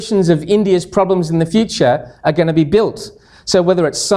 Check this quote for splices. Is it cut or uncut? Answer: uncut